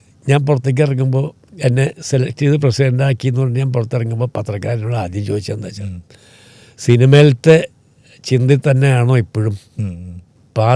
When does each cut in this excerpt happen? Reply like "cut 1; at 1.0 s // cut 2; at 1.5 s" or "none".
none